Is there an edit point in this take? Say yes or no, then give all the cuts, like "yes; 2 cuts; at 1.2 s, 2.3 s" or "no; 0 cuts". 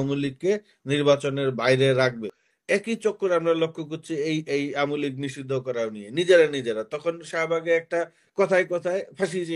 yes; 1 cut; at 2.4 s